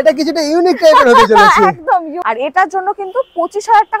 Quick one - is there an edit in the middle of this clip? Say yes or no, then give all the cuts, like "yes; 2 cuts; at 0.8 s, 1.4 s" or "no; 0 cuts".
yes; 1 cut; at 2.2 s